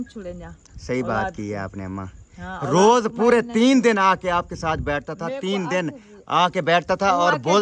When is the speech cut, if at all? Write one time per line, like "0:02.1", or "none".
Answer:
none